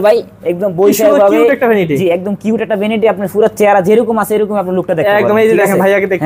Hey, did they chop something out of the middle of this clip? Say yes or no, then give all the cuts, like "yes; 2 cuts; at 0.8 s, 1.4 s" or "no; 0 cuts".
no; 0 cuts